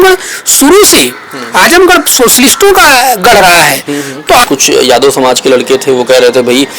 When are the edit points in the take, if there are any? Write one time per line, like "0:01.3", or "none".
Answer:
0:04.4